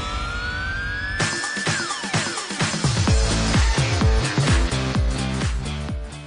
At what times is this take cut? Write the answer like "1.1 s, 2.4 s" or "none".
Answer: none